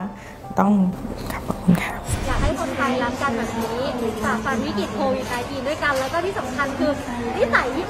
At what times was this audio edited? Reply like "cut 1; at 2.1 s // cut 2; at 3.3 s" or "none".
cut 1; at 2.1 s